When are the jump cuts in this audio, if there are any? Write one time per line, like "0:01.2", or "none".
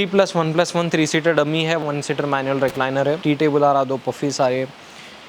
0:01.8
0:03.2